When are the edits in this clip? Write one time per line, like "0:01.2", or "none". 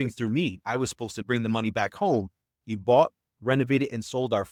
none